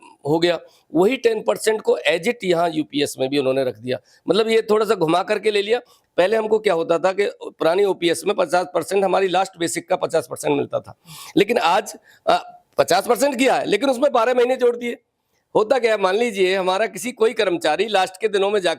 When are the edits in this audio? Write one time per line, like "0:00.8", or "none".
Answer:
0:05.9